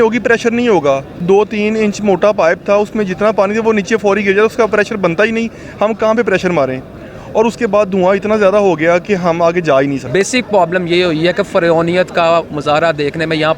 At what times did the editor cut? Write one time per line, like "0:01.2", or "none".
0:01.2
0:10.1

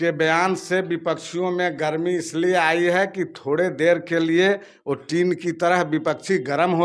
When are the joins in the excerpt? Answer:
none

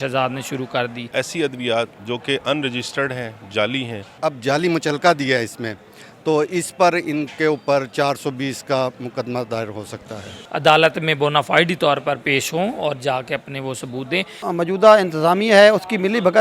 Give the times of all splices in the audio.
0:01.1
0:04.1
0:10.3
0:14.5

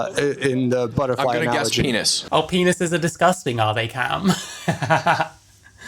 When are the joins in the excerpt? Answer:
0:02.2

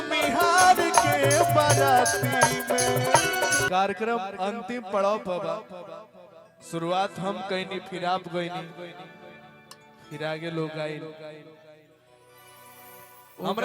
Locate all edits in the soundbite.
0:03.7

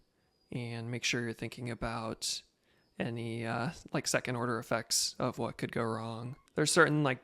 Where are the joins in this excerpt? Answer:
0:06.3

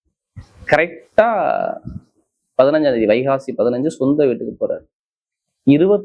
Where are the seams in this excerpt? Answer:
none

